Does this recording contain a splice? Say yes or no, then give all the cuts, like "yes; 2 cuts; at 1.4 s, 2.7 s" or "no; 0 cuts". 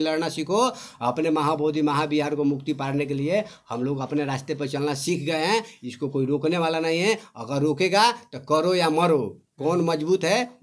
no; 0 cuts